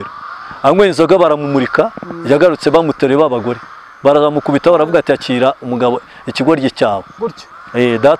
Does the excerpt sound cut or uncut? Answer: uncut